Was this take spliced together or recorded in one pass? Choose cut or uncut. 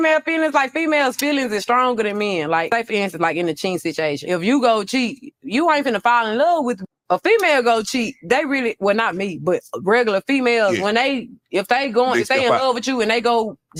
uncut